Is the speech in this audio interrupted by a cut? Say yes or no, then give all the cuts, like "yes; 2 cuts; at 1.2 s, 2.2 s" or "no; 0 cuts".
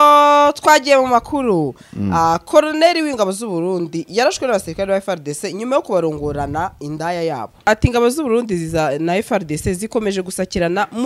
yes; 1 cut; at 7.6 s